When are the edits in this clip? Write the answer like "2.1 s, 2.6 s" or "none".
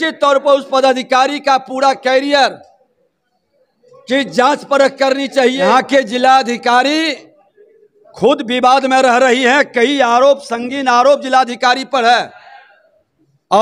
5.7 s